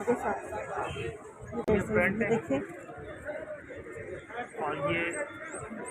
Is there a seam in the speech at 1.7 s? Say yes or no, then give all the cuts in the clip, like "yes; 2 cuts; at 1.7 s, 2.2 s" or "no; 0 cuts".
yes; 1 cut; at 1.7 s